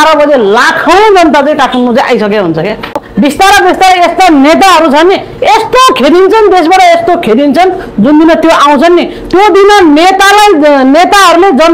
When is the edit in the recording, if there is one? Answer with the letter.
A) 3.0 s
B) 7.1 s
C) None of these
A